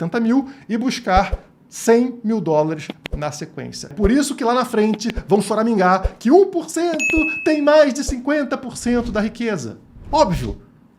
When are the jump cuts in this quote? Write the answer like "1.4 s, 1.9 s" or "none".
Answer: 3.7 s